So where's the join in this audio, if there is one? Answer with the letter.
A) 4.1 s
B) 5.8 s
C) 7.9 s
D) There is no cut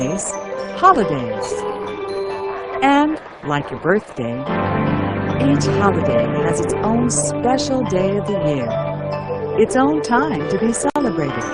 A